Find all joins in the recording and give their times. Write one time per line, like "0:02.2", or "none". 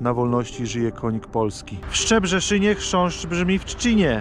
0:01.7